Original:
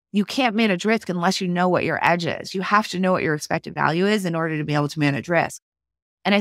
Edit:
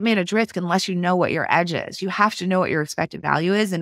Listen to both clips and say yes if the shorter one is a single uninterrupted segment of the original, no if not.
yes